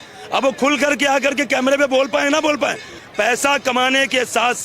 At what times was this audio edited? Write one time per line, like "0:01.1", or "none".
0:02.9